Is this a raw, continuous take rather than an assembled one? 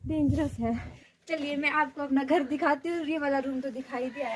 no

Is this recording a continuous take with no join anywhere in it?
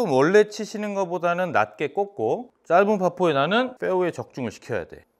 no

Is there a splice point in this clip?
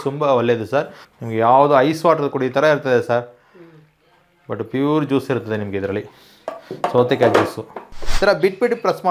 yes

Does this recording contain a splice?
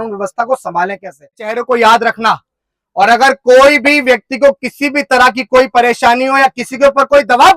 yes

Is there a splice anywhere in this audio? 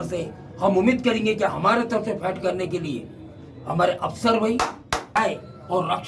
yes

